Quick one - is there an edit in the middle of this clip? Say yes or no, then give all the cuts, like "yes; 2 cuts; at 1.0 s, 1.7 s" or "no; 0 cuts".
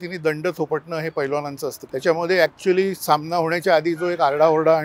yes; 1 cut; at 1.8 s